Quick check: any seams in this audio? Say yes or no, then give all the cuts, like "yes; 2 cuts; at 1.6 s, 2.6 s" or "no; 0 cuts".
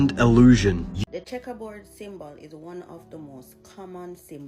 yes; 1 cut; at 0.9 s